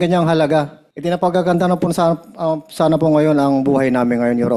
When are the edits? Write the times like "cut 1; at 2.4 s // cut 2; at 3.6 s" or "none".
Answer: cut 1; at 1.2 s